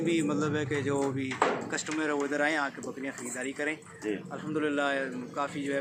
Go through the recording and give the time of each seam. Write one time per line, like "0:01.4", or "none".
none